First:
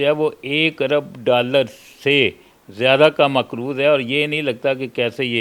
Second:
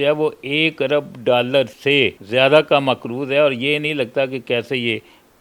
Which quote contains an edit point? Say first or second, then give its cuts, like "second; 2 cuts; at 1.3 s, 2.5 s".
second; 1 cut; at 1.9 s